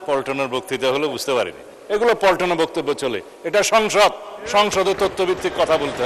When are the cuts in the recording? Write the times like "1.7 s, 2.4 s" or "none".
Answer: 1.8 s